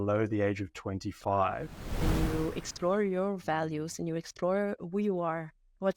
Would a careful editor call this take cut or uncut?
cut